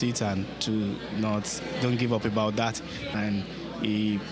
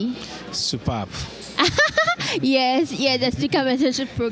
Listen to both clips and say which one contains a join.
first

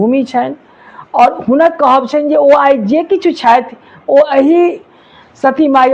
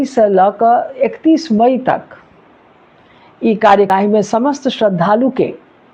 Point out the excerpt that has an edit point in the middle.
second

